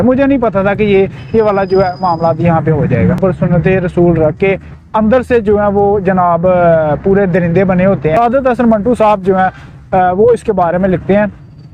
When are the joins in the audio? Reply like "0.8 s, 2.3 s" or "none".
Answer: 3.2 s, 8.1 s